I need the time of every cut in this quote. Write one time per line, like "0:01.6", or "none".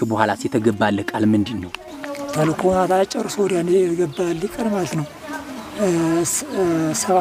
none